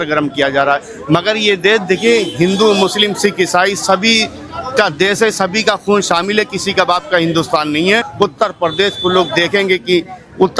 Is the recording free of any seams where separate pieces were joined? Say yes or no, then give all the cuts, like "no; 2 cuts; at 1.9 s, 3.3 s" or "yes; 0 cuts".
no; 1 cut; at 8.1 s